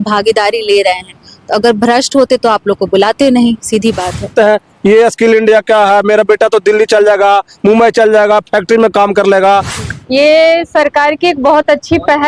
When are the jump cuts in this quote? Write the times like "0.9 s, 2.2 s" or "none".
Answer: 4.3 s, 9.8 s